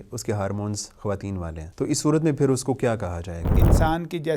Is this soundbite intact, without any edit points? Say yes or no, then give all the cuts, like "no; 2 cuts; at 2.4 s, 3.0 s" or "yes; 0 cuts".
no; 2 cuts; at 1.6 s, 3.6 s